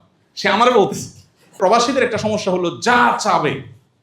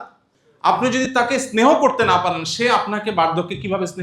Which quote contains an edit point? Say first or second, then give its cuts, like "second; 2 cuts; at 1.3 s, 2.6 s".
first; 1 cut; at 1.6 s